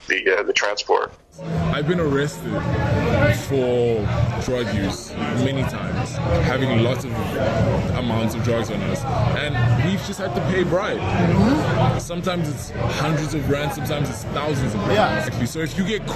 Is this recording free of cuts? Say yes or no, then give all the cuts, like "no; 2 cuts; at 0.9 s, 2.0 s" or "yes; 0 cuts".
no; 1 cut; at 1.5 s